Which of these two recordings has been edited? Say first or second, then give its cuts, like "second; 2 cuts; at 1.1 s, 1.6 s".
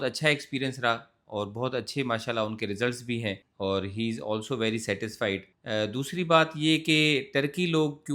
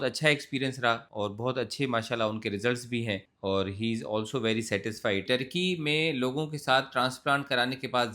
second; 2 cuts; at 1.1 s, 5.2 s